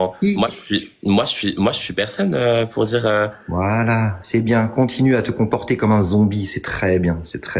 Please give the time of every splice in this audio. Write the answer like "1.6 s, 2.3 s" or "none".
none